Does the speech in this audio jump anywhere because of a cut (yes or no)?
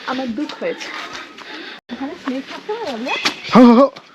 yes